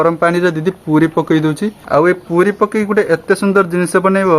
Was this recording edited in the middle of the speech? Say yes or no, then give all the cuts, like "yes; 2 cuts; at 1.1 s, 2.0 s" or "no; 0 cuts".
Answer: yes; 1 cut; at 1.7 s